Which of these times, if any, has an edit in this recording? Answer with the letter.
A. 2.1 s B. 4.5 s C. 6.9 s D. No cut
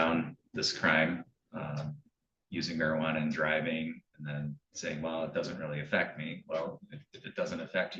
D